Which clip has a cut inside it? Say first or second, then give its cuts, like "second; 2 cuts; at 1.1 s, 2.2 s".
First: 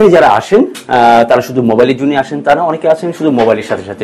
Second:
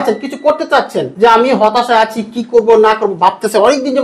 second; 1 cut; at 1.0 s